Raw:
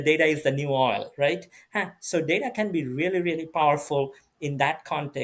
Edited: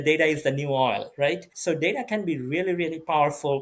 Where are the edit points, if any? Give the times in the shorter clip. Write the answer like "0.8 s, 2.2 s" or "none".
1.5 s